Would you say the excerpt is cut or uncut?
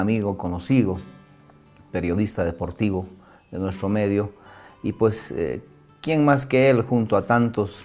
cut